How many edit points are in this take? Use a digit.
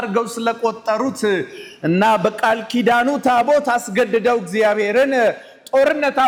0